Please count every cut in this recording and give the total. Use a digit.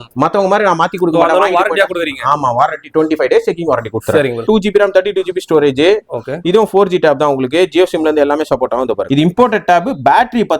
2